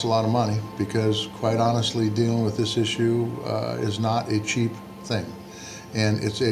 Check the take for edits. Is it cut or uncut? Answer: uncut